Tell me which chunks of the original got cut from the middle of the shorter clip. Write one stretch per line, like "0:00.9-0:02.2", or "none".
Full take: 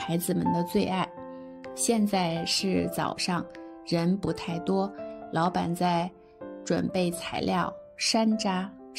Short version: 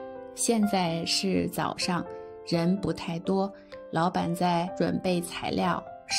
0:06.1-0:06.6